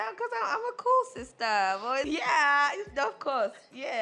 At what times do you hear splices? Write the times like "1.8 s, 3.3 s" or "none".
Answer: 2.1 s